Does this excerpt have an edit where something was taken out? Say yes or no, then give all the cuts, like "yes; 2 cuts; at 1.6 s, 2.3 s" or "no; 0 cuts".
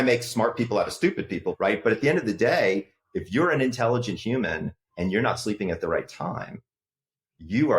yes; 1 cut; at 1.5 s